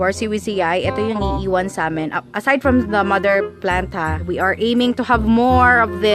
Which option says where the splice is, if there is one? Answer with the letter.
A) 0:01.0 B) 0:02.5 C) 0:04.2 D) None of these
C